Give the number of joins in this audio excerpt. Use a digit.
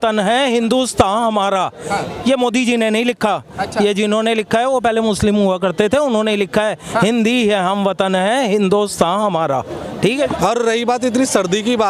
1